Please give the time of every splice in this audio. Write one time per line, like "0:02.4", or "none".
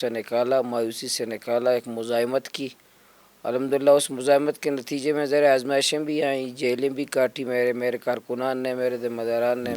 none